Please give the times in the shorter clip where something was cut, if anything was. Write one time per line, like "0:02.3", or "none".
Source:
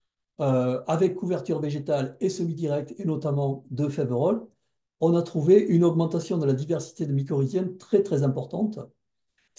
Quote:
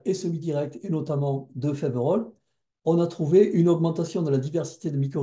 none